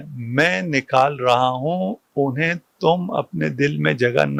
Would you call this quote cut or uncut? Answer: uncut